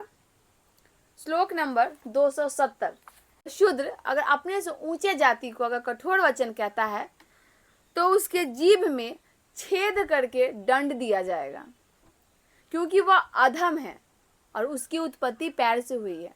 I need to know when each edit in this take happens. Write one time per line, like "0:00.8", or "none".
0:03.5